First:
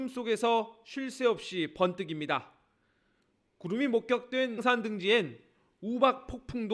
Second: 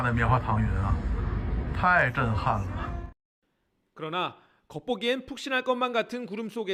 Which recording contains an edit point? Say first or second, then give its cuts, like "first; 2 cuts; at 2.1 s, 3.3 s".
first; 1 cut; at 4.6 s